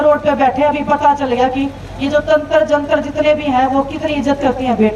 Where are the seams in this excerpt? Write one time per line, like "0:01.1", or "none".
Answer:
none